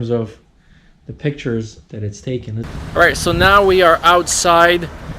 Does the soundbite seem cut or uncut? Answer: cut